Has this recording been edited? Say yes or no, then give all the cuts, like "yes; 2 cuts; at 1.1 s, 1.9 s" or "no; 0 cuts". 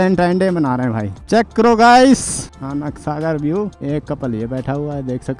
no; 0 cuts